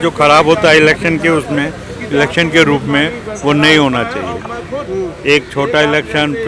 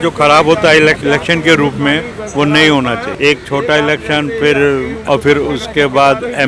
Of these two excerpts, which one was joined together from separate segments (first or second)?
second